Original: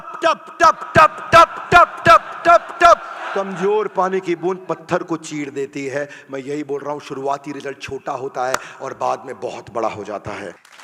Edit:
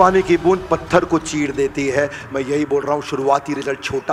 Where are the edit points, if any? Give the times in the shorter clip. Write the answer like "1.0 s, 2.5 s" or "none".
none